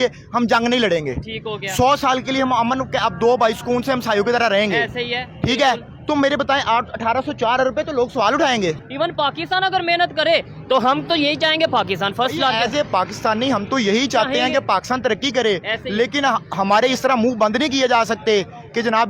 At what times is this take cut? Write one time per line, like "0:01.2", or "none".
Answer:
0:08.8